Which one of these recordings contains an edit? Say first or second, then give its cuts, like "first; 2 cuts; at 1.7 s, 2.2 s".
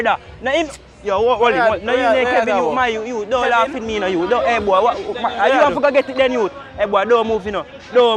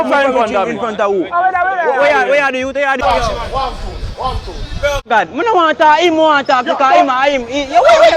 second; 1 cut; at 3.0 s